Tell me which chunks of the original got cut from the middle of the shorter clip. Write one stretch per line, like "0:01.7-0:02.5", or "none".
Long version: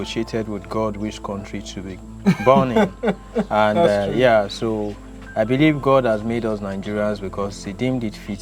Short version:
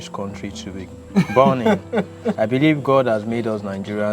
0:03.3-0:05.2